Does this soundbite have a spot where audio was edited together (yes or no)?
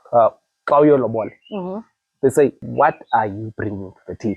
yes